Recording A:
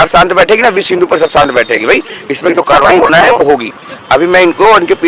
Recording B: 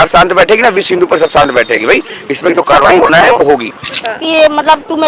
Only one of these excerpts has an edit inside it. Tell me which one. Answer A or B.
B